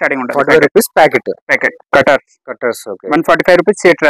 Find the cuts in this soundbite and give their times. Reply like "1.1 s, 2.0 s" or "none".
1.7 s